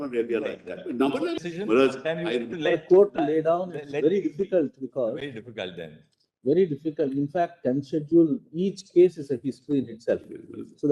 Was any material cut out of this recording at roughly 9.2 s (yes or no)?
no